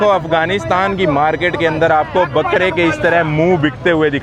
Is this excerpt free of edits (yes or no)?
yes